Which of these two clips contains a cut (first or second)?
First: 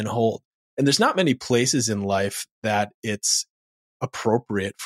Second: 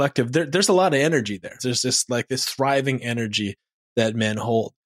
second